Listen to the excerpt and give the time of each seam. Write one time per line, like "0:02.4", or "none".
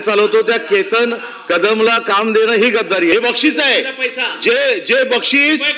0:03.1